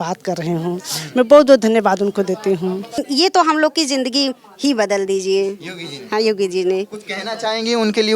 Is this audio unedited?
no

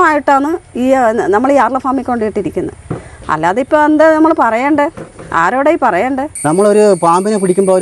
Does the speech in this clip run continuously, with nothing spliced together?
no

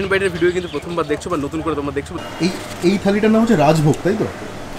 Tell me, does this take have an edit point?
yes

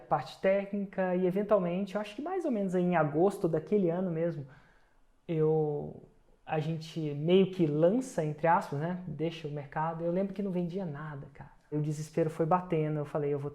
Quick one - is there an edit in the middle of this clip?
yes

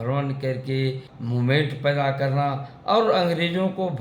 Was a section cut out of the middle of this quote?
yes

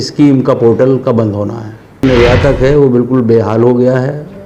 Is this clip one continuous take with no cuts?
no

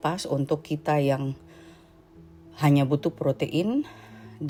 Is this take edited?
no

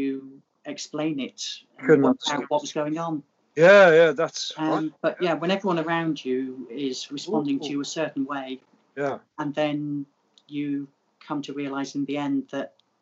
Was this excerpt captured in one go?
yes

